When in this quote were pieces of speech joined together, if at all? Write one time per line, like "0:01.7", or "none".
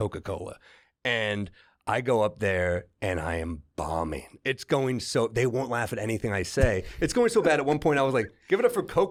none